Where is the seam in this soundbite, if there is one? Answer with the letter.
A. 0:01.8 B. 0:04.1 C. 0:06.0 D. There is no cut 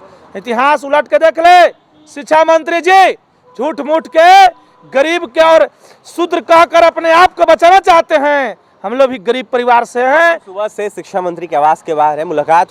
D